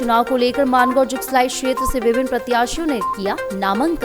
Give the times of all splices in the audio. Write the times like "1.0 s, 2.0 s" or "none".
none